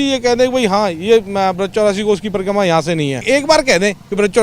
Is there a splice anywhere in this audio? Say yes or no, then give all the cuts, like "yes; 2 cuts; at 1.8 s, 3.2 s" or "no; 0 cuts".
yes; 1 cut; at 3.2 s